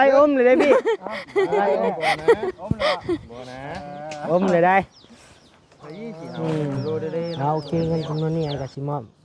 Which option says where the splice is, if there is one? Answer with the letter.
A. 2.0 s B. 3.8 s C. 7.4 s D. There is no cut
C